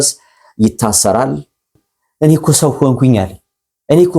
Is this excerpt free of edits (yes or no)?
no